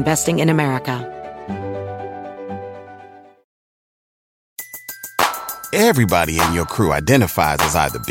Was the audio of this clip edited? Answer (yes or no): yes